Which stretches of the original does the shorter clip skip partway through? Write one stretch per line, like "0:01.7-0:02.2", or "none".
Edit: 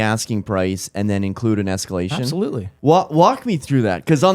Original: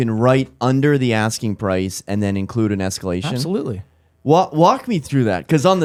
0:03.8-0:04.1